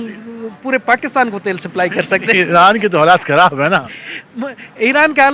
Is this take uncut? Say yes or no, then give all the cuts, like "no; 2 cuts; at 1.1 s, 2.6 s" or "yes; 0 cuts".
yes; 0 cuts